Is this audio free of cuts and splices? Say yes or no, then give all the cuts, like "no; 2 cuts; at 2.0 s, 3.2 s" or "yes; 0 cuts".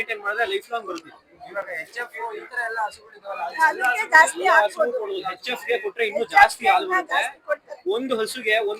yes; 0 cuts